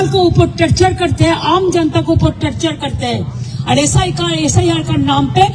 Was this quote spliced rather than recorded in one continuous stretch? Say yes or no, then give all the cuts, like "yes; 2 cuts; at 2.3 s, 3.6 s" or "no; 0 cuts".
no; 0 cuts